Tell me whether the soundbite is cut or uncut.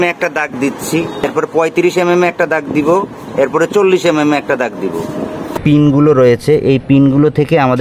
cut